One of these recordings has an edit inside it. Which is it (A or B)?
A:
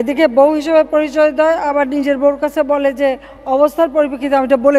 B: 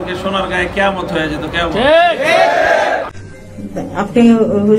B